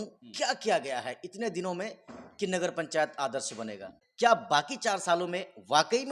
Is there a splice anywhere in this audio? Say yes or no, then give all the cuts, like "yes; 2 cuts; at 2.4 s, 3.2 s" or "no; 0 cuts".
yes; 1 cut; at 4.0 s